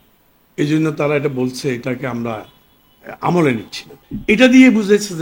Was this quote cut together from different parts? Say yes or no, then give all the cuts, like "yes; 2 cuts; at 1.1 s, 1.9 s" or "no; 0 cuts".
yes; 1 cut; at 4.1 s